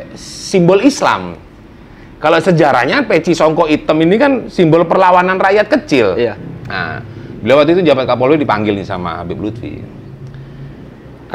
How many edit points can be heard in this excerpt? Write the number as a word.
one